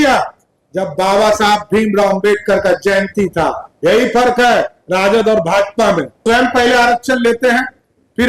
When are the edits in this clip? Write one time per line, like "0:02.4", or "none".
0:06.2

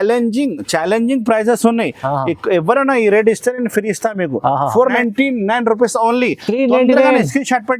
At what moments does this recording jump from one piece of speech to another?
0:05.0

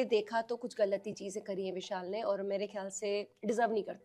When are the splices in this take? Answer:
none

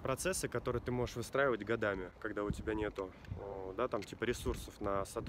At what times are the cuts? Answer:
none

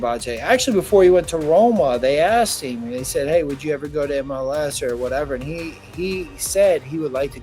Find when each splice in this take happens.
none

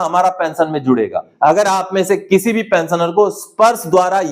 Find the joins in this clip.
0:01.2

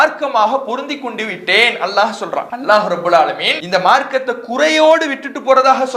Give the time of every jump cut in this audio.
0:02.5
0:03.5

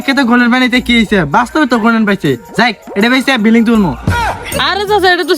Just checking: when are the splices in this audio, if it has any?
0:04.2

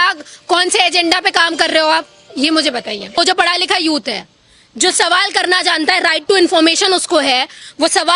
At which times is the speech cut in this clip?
0:03.2

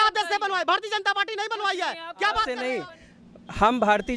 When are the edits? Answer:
0:02.6

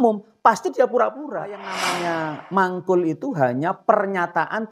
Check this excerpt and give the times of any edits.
0:01.9

